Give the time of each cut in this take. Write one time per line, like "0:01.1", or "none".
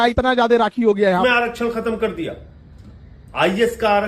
0:01.2